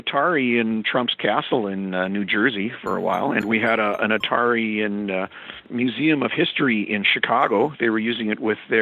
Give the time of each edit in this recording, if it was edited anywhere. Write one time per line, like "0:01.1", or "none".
0:03.4
0:05.5